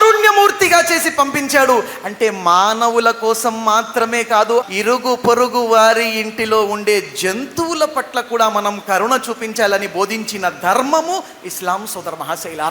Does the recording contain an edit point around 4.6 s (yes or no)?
yes